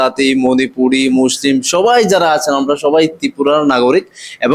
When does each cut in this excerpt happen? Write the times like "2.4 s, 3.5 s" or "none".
none